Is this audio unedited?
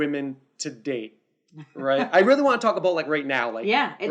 yes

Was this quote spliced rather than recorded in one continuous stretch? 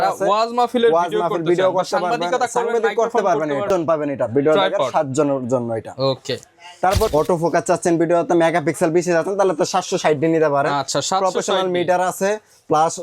yes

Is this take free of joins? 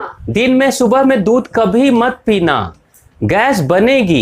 yes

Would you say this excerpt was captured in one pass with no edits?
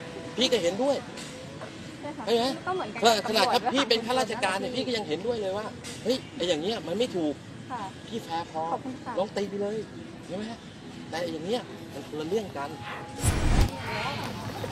no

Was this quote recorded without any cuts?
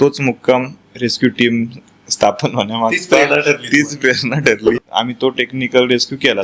no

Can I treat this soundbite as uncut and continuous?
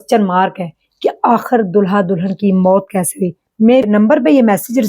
no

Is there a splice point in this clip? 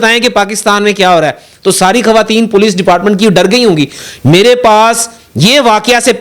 no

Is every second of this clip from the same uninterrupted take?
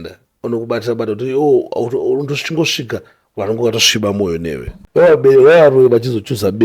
no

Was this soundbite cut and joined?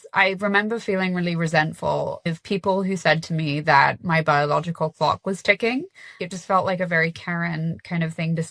yes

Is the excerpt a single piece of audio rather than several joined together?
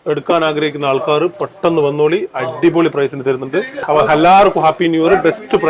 no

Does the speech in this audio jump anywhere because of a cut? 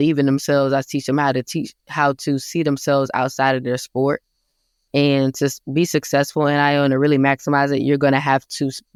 no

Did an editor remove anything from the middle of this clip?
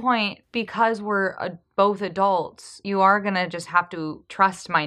no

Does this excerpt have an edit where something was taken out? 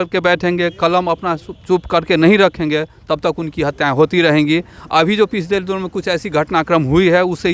no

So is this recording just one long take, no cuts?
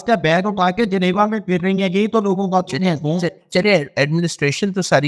yes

